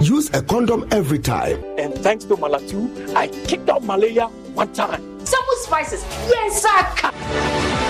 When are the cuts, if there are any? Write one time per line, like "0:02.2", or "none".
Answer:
none